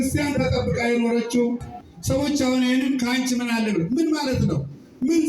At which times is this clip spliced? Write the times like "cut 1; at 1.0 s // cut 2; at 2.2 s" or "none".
cut 1; at 1.7 s